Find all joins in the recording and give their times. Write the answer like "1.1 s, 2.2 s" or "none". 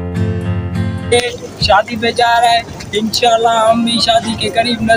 1.1 s